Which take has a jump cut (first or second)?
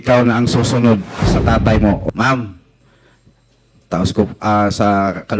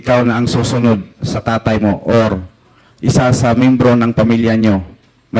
first